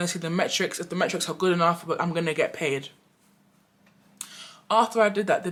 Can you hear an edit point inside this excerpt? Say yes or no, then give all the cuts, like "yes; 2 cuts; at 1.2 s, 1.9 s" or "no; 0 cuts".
no; 0 cuts